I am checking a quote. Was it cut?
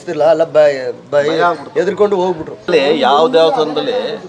yes; 1 cut; at 2.6 s

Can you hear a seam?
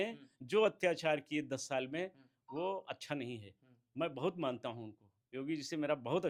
no; 0 cuts

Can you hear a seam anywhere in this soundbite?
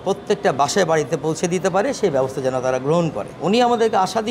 yes; 1 cut; at 3.3 s

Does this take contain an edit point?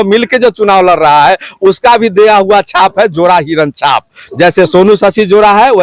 no; 0 cuts

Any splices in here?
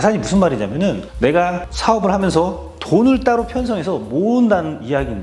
no; 0 cuts

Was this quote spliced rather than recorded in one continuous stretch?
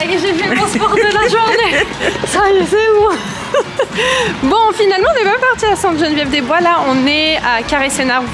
no; 0 cuts

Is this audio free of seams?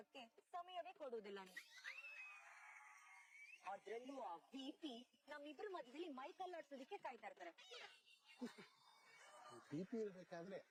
yes; 0 cuts

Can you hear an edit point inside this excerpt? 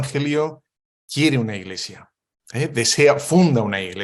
no; 0 cuts

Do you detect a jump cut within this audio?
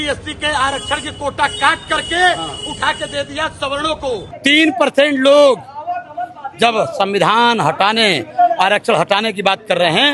yes; 1 cut; at 4.3 s

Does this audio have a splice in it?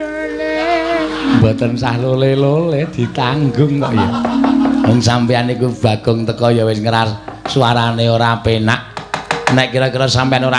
yes; 1 cut; at 1.4 s

